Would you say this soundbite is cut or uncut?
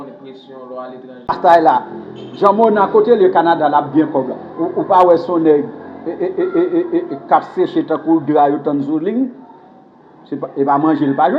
cut